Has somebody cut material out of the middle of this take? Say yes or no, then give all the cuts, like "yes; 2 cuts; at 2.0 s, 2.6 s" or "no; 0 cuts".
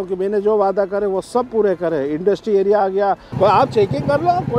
yes; 1 cut; at 3.3 s